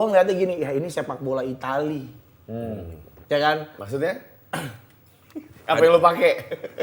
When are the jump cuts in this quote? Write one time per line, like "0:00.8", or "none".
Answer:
none